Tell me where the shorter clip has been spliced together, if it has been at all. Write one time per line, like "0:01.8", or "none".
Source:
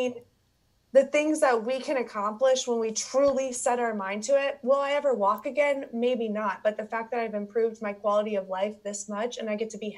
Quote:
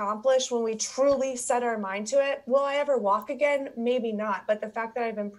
none